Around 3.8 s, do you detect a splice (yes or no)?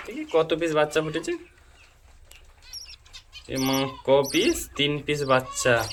no